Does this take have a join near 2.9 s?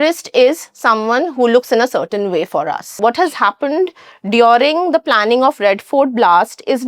yes; 1 cut; at 2.9 s

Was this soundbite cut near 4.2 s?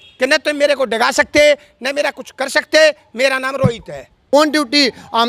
yes; 1 cut; at 4.2 s

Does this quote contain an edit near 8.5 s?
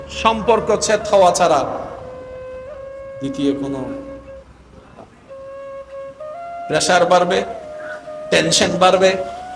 no; 2 cuts; at 2.0 s, 3.2 s

